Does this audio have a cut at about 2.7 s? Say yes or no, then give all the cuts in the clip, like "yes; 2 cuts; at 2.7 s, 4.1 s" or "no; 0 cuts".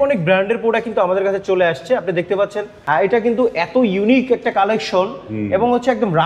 yes; 1 cut; at 2.7 s